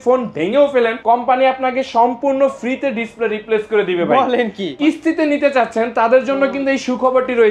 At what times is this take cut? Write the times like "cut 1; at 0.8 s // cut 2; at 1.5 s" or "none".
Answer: cut 1; at 1.0 s // cut 2; at 4.7 s